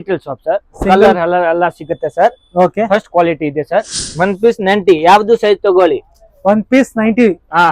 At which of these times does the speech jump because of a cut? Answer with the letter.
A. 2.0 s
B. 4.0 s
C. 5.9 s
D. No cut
B